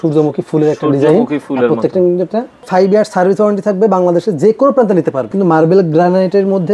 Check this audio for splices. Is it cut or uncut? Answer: cut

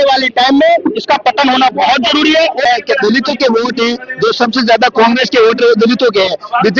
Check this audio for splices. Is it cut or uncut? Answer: cut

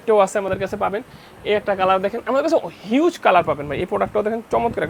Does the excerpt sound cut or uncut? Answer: uncut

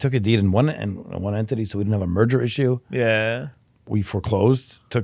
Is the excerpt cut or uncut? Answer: cut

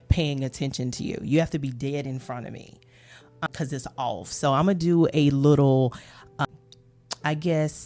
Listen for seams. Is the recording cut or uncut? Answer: cut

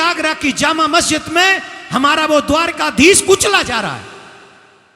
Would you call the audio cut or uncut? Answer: uncut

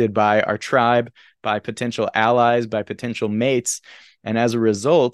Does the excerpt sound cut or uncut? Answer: uncut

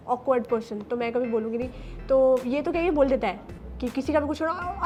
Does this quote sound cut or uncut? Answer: uncut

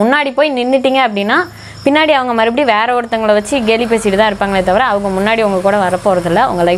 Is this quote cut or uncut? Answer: uncut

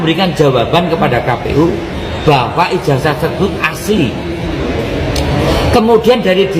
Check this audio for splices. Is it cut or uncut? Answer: uncut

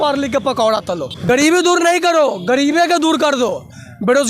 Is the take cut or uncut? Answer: cut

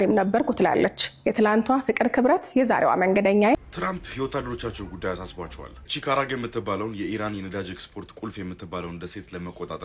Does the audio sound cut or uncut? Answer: cut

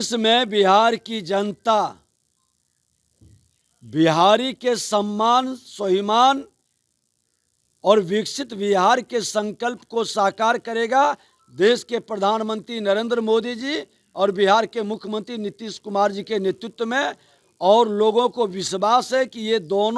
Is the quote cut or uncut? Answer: uncut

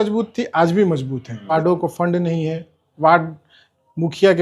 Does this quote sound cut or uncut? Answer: cut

